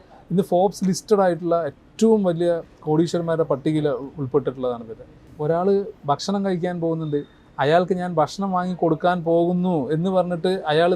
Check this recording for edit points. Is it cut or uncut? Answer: cut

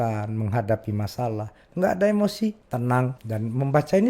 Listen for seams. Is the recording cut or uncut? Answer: cut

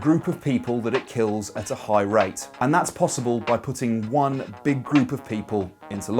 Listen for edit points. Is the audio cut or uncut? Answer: cut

